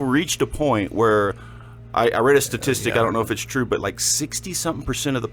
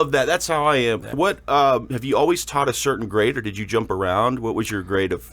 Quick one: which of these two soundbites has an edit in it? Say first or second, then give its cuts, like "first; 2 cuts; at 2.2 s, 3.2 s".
second; 1 cut; at 1.2 s